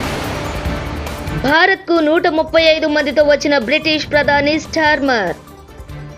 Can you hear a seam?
yes; 1 cut; at 1.3 s

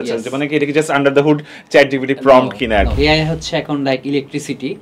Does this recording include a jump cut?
yes; 1 cut; at 2.9 s

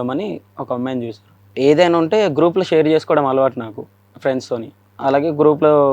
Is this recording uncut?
no; 2 cuts; at 1.4 s, 4.9 s

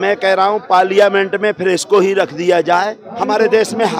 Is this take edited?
yes; 1 cut; at 3.0 s

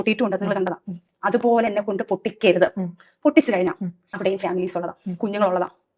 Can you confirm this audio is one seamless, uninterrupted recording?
no; 1 cut; at 4.0 s

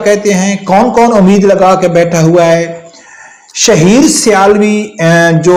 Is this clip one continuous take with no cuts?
yes; 0 cuts

